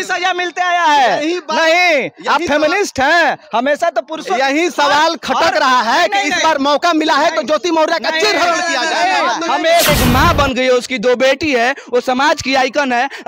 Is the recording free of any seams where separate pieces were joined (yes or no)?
no